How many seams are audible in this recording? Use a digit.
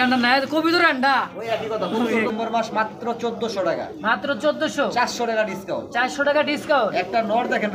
1